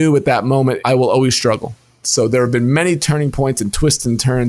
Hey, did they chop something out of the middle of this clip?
yes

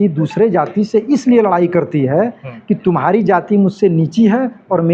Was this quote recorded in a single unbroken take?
yes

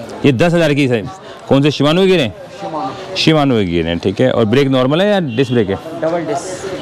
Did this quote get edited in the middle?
yes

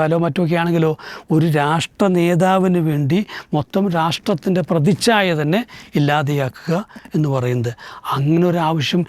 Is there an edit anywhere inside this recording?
no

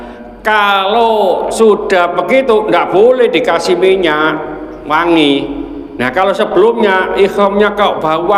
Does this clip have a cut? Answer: no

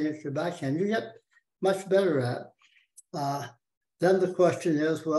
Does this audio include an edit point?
no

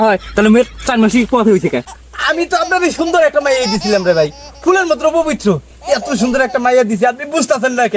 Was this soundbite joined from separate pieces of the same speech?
yes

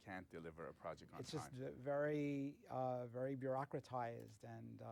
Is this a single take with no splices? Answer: yes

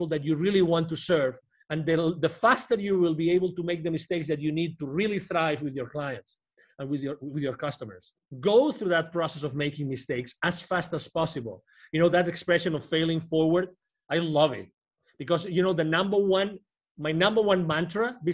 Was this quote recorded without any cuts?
no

